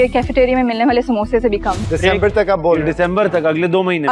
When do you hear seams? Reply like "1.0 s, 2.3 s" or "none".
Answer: 1.8 s